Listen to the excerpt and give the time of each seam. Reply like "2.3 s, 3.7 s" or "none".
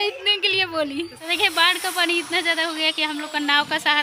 1.2 s